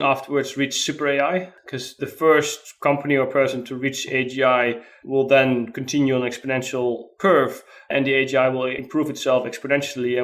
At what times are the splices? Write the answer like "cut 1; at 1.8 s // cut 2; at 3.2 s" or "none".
cut 1; at 1.6 s